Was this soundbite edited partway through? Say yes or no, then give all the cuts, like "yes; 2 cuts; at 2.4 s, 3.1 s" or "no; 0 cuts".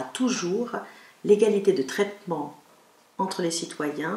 no; 0 cuts